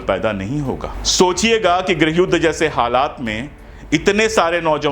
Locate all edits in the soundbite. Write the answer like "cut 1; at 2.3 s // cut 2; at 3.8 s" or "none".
cut 1; at 1.0 s